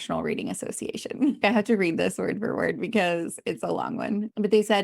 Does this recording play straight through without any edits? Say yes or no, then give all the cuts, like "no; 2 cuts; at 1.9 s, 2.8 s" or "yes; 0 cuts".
no; 1 cut; at 1.4 s